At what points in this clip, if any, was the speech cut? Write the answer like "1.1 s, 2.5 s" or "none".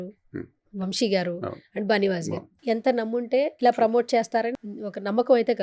2.5 s, 3.5 s, 4.5 s